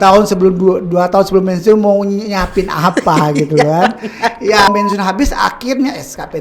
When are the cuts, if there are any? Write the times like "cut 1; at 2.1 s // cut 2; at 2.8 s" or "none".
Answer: cut 1; at 4.7 s